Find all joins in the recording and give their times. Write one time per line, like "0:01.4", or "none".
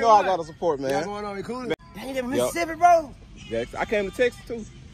0:01.7

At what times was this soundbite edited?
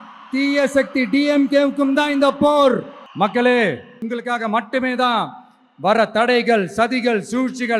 0:03.0
0:04.0

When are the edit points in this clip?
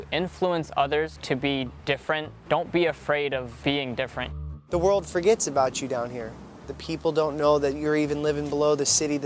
0:01.2
0:02.3
0:03.5
0:04.4
0:06.7

